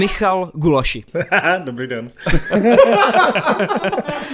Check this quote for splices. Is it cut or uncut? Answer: cut